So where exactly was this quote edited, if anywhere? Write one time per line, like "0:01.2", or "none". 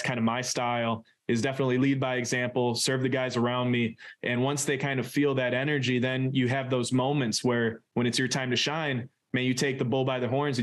none

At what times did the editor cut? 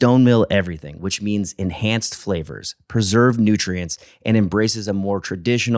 none

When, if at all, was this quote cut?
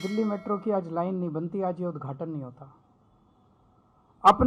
none

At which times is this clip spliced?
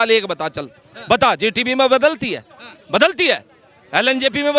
none

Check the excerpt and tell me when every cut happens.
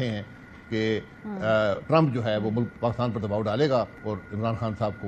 none

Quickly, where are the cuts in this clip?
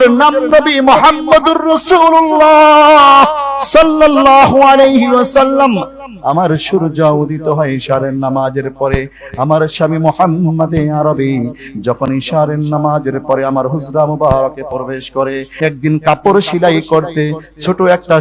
none

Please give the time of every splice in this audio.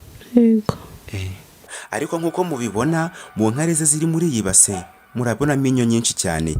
0:01.7

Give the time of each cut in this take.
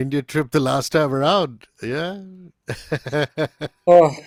none

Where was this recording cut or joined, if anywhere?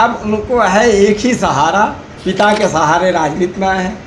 0:02.1

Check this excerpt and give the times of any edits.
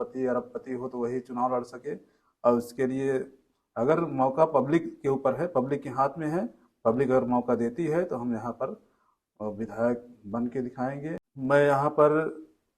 0:11.3

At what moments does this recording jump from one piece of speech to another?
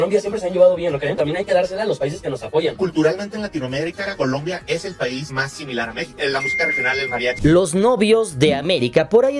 none

